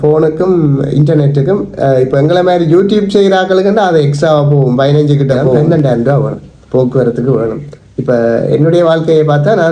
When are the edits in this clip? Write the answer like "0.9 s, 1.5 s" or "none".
5.6 s